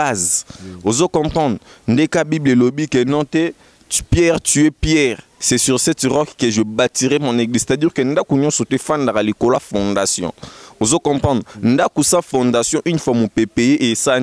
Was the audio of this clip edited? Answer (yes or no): no